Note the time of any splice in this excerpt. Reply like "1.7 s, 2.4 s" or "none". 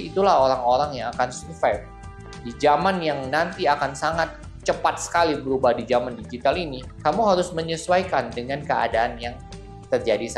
none